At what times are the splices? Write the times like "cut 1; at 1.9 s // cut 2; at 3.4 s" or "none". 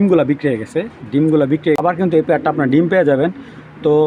cut 1; at 1.6 s